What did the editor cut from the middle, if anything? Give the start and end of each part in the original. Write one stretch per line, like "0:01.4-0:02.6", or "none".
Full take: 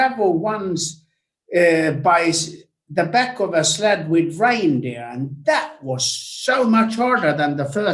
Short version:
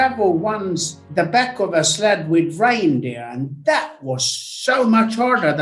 0:00.9-0:02.7